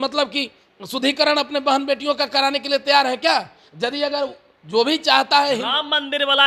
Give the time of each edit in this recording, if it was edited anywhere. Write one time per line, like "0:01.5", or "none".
none